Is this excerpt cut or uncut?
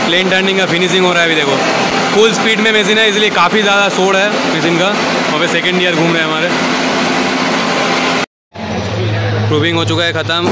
uncut